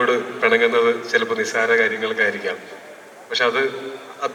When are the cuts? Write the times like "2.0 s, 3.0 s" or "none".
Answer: none